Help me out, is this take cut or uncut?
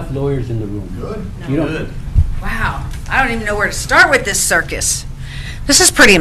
cut